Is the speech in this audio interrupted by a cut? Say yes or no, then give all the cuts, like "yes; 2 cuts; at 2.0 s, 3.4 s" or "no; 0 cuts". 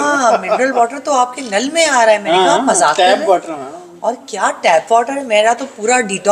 no; 0 cuts